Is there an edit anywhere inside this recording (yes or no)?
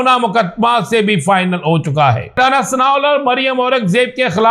yes